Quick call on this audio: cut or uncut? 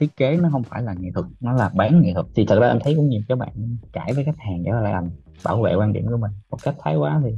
cut